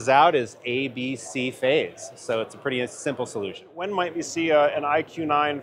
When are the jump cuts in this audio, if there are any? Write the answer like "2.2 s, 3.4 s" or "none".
3.8 s

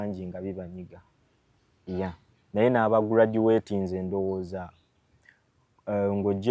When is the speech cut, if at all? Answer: none

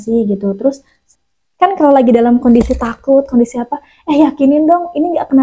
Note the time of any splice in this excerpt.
1.0 s

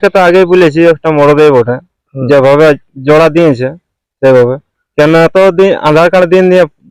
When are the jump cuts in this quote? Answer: none

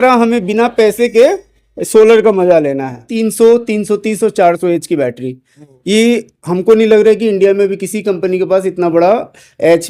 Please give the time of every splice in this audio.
3.0 s

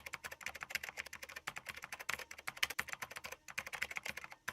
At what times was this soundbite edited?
1.5 s

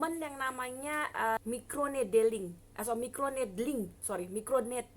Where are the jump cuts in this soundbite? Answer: 1.4 s

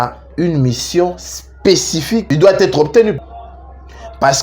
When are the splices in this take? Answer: none

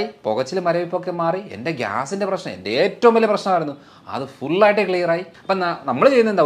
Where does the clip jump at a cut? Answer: 5.3 s

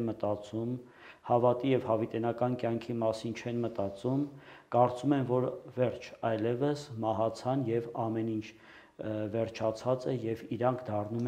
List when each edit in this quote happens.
none

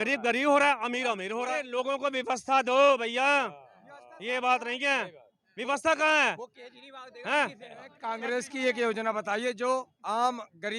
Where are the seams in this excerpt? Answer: 1.7 s, 8.0 s

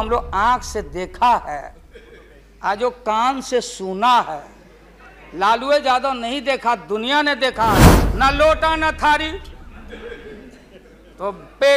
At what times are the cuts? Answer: 7.9 s

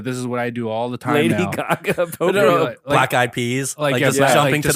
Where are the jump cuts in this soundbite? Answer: none

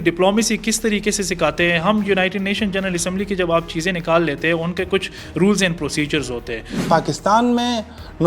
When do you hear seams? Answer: 6.8 s

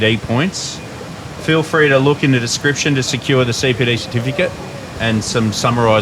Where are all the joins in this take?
5.0 s

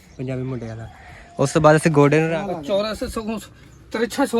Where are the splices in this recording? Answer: 2.2 s

